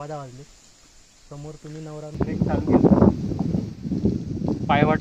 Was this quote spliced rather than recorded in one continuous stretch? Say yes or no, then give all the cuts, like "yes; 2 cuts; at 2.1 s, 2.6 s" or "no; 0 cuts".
yes; 1 cut; at 2.2 s